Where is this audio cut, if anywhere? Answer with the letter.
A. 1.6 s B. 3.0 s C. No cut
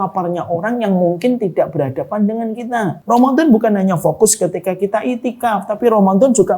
B